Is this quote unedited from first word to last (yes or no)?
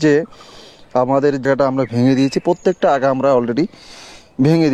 no